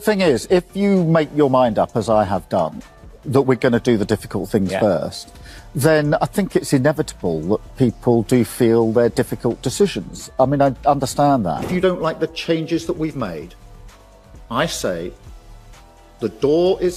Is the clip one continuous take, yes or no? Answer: yes